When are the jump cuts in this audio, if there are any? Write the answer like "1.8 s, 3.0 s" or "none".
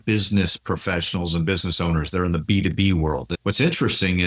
3.3 s